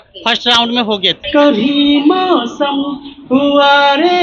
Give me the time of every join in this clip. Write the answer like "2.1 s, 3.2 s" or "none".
1.2 s